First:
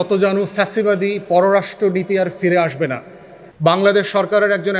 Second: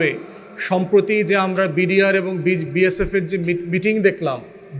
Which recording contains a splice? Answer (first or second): first